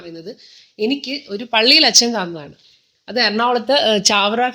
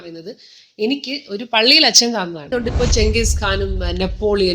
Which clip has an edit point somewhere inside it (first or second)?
second